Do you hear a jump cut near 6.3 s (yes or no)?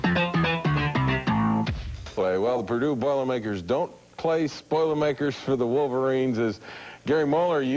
no